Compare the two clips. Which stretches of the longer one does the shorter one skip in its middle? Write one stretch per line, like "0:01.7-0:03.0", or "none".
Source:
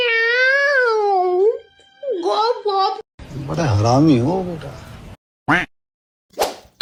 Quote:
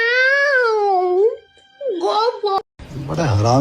0:02.8-0:03.0